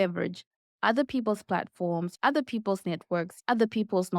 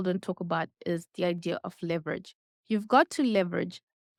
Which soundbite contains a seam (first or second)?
first